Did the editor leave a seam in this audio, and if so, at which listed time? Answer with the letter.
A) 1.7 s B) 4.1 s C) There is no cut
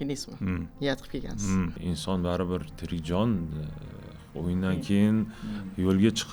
A